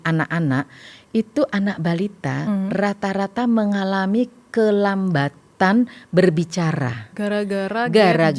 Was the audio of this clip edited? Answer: no; 0 cuts

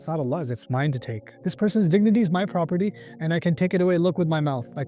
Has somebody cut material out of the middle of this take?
yes; 1 cut; at 1.3 s

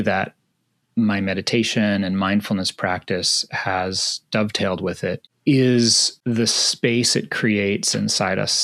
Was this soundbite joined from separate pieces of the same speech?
yes; 2 cuts; at 5.3 s, 6.1 s

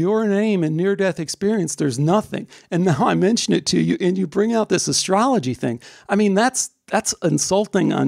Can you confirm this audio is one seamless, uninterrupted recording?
yes; 0 cuts

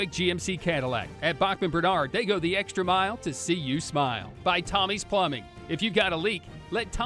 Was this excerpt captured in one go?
yes; 0 cuts

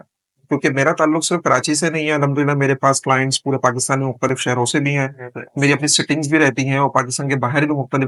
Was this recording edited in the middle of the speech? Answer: no; 0 cuts

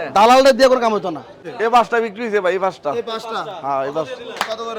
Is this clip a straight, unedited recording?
no; 1 cut; at 1.4 s

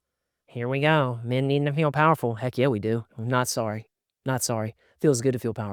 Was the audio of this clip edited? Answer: no; 0 cuts

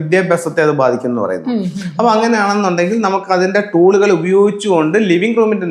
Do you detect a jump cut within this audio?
no; 0 cuts

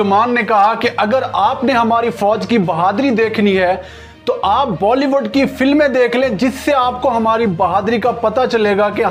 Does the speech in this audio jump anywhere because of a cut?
no; 0 cuts

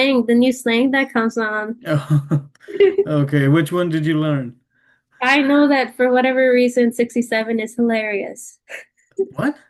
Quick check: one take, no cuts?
yes; 0 cuts

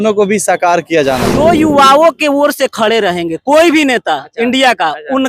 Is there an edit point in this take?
yes; 1 cut; at 1.3 s

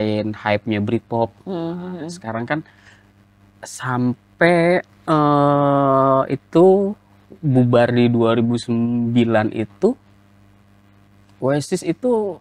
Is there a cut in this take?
no; 0 cuts

